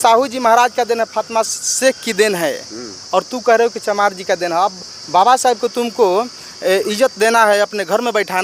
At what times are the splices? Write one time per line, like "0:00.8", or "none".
none